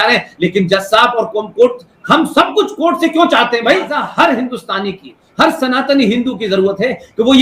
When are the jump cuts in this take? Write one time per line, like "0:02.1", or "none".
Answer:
0:04.1